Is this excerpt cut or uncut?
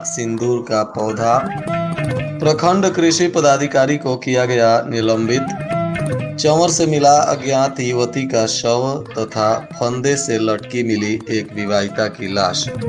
uncut